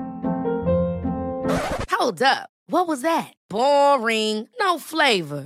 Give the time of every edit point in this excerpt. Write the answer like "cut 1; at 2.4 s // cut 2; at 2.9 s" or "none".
none